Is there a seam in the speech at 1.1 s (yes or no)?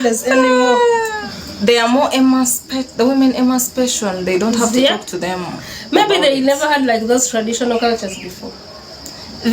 yes